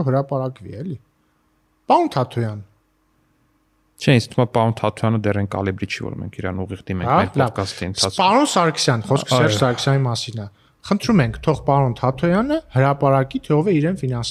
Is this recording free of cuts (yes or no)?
yes